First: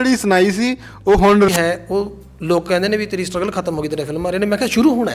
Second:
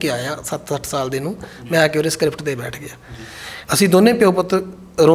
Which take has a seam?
first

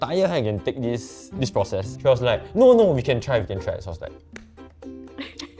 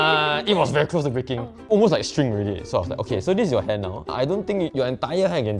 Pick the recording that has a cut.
second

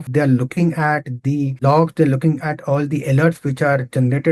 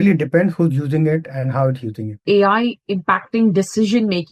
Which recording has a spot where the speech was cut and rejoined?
second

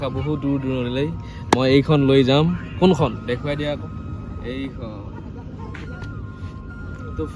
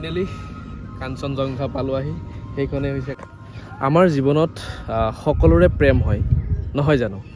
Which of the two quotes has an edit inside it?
second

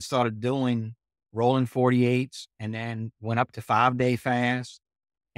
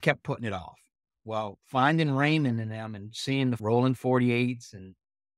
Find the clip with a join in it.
second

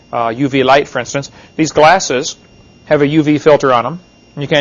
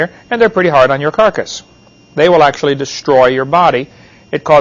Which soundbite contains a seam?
second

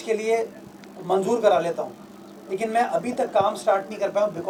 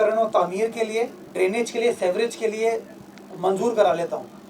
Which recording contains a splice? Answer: second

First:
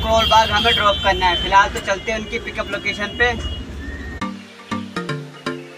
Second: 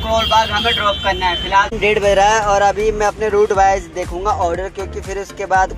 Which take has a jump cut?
second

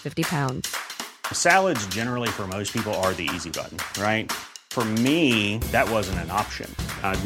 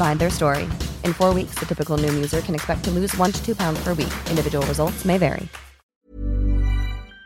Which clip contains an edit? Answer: second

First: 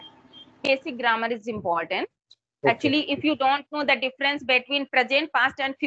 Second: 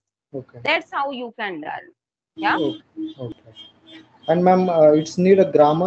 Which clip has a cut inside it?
second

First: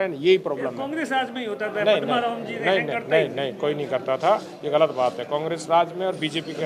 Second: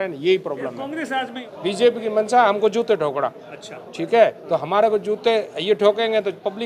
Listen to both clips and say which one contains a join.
second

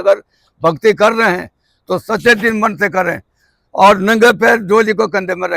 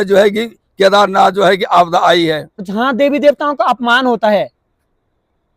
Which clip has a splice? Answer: second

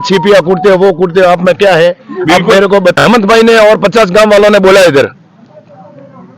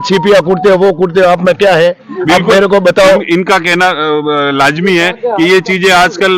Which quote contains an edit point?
first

